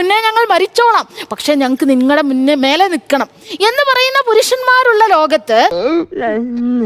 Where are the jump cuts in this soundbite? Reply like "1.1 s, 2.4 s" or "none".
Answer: none